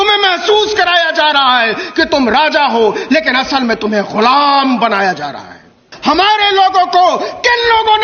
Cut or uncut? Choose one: cut